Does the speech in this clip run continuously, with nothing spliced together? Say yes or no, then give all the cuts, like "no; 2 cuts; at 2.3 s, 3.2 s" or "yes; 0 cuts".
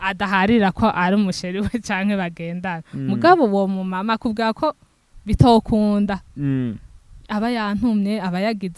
yes; 0 cuts